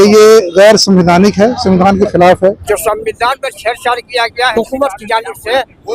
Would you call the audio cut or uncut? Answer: cut